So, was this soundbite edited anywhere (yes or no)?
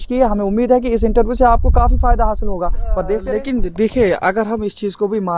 yes